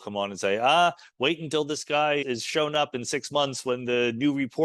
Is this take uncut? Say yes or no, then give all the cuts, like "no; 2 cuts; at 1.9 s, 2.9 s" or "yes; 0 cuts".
no; 1 cut; at 2.2 s